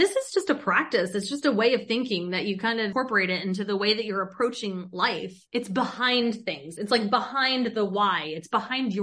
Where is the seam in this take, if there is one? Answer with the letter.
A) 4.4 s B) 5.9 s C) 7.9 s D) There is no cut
D